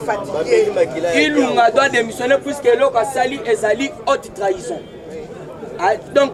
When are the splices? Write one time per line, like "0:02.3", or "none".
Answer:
none